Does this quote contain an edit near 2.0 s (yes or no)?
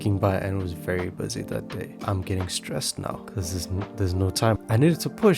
yes